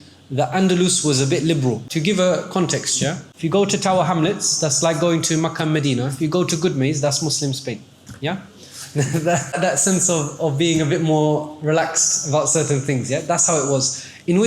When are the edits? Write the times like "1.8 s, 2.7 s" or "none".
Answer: 1.9 s, 3.3 s